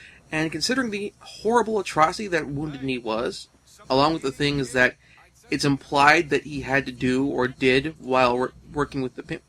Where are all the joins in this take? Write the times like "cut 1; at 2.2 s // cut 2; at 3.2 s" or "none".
cut 1; at 7.1 s

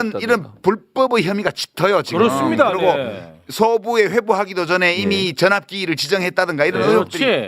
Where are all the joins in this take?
none

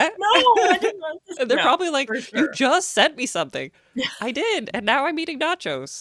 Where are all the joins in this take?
cut 1; at 1.2 s

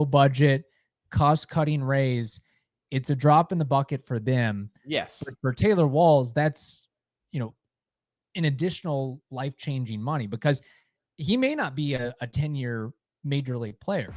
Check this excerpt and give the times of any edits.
none

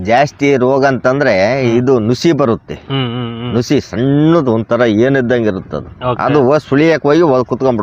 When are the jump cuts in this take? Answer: none

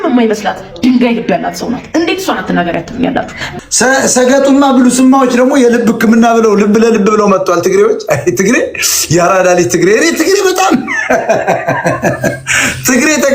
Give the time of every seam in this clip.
cut 1; at 3.5 s

